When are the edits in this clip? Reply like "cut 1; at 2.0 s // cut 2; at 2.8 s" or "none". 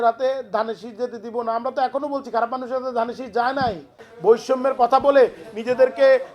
cut 1; at 4.1 s